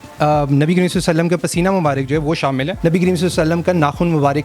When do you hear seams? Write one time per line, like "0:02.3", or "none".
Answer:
0:02.7